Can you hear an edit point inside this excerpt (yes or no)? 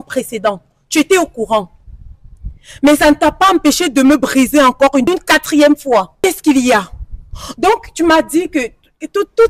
yes